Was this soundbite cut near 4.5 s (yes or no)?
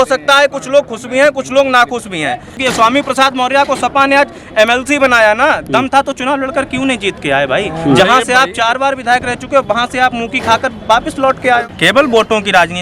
no